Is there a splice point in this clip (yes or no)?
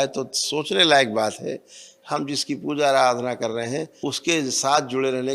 yes